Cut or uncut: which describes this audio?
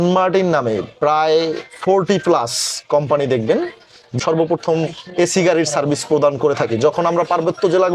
cut